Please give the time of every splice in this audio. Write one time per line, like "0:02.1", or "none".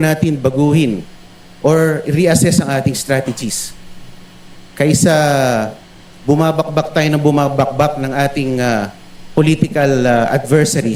none